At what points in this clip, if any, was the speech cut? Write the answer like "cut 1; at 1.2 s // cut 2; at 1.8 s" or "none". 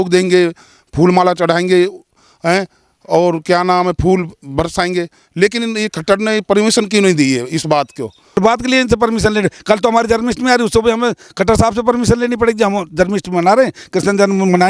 cut 1; at 8.4 s